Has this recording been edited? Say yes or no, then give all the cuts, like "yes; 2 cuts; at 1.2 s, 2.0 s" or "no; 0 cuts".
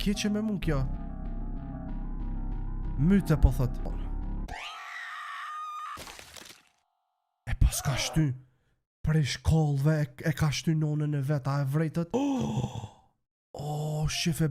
yes; 2 cuts; at 3.9 s, 12.1 s